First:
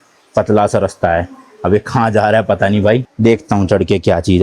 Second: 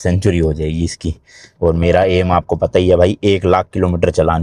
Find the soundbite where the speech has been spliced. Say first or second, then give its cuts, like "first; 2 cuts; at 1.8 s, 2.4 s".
first; 1 cut; at 3.1 s